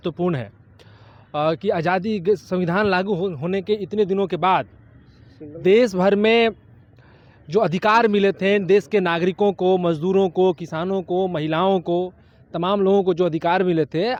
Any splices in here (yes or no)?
no